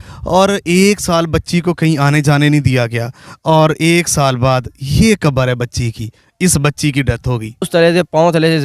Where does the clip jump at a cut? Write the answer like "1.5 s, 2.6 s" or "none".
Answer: 7.7 s